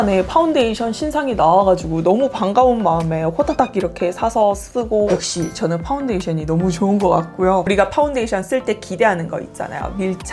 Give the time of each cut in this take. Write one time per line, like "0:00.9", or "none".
0:05.1
0:07.7